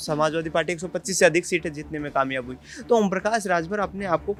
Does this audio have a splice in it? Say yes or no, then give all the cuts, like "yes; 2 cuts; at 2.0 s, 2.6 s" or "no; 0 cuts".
no; 0 cuts